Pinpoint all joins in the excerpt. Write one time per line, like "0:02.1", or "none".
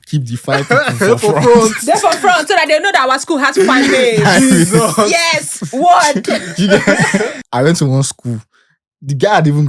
0:07.4